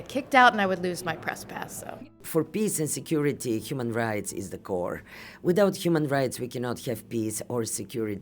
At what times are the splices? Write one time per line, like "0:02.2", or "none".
0:02.2